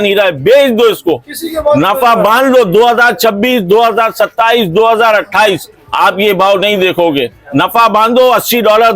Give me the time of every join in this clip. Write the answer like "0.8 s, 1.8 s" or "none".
none

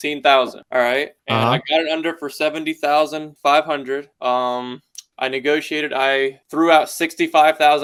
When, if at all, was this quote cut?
none

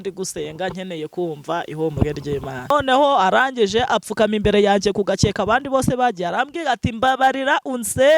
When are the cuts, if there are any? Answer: 2.7 s

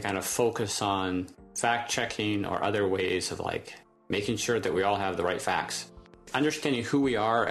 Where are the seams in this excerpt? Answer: 6.3 s

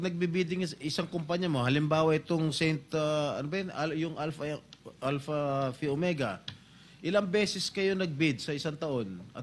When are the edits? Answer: none

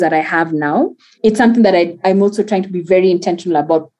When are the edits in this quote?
1.0 s, 2.0 s

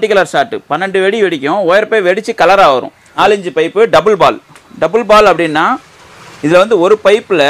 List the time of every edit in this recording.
3.0 s

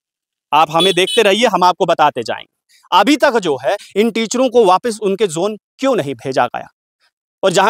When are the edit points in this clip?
2.7 s

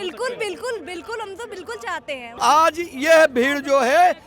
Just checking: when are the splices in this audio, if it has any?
2.2 s

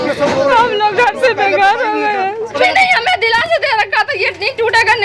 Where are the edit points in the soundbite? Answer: 2.6 s

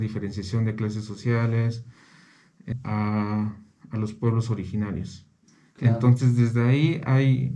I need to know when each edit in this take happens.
2.7 s

